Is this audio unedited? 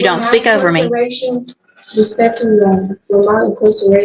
yes; 0 cuts

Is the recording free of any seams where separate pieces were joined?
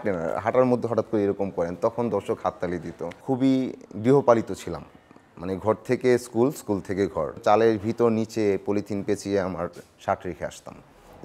no; 2 cuts; at 3.1 s, 7.4 s

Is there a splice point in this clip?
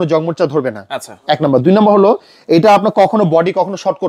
no; 0 cuts

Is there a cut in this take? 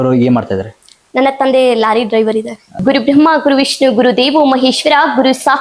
yes; 1 cut; at 2.8 s

